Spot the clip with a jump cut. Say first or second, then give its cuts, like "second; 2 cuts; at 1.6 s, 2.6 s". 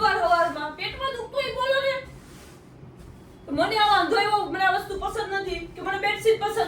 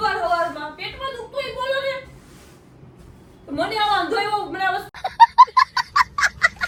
first; 1 cut; at 5.0 s